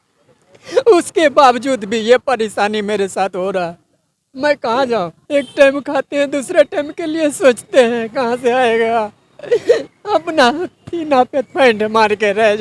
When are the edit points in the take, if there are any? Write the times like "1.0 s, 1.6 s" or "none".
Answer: 5.2 s